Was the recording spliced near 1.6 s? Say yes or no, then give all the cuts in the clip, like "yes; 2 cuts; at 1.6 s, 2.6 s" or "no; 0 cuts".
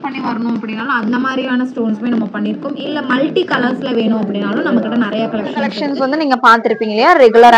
no; 1 cut; at 5.8 s